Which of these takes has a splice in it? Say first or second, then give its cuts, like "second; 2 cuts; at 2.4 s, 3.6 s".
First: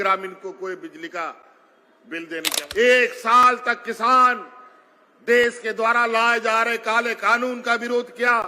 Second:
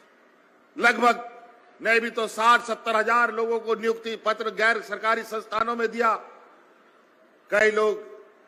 first; 1 cut; at 2.6 s